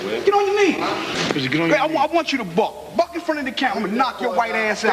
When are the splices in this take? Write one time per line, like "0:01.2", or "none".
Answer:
none